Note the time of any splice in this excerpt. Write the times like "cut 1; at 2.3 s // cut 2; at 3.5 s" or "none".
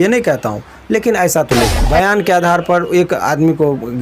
cut 1; at 1.8 s